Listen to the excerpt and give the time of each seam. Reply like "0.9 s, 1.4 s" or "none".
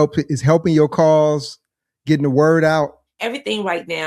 2.9 s